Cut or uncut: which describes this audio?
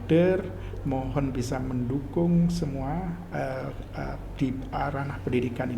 uncut